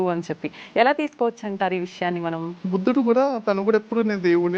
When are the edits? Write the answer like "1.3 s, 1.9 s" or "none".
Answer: 2.7 s

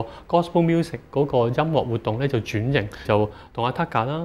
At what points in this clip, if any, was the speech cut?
3.0 s

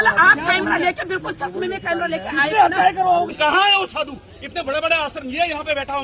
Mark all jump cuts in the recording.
3.3 s

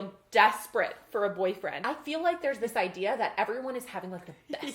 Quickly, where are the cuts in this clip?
1.8 s

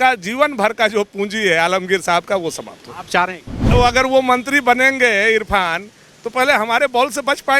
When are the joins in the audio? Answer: 3.7 s

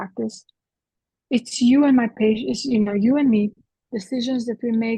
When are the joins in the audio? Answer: 3.7 s

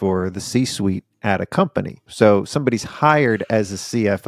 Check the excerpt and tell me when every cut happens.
2.0 s

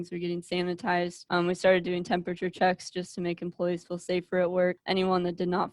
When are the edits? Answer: 1.2 s, 4.8 s

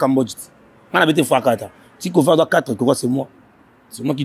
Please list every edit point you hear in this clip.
none

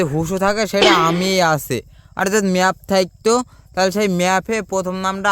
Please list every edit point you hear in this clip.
none

